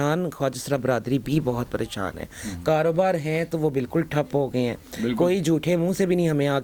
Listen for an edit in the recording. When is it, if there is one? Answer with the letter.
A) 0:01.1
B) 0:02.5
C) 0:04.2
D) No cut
D